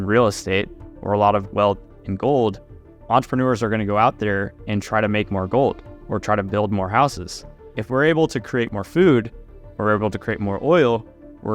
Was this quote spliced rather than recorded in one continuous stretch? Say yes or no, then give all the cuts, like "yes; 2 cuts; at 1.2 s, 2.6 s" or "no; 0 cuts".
yes; 3 cuts; at 3.0 s, 7.7 s, 8.7 s